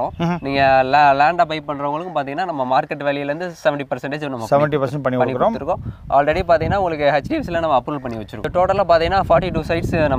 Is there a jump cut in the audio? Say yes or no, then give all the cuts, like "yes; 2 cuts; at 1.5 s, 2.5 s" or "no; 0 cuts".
yes; 1 cut; at 8.4 s